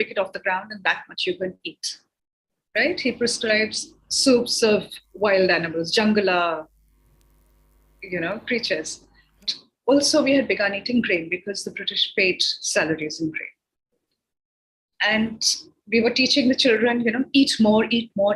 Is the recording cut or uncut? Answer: cut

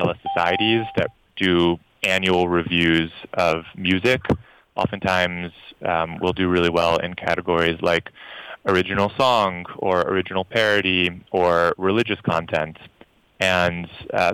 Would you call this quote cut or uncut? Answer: uncut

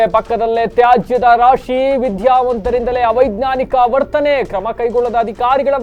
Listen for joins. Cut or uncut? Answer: uncut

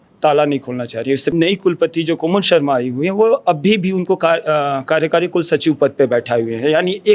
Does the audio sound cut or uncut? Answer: cut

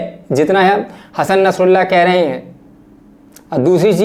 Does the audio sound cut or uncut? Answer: uncut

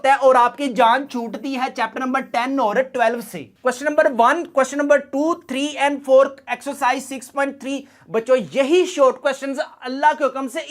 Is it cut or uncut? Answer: cut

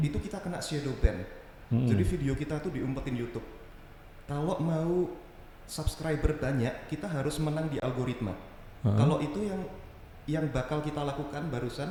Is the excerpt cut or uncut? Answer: uncut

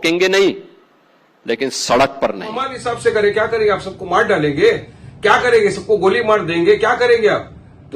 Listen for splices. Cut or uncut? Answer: cut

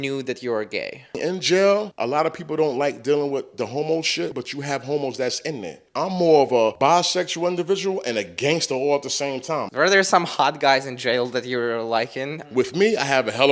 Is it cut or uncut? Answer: cut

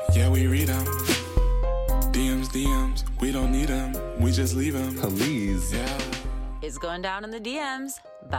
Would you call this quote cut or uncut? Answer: uncut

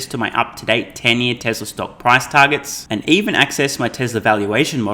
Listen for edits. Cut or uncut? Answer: uncut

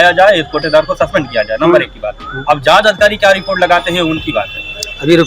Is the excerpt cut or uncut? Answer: uncut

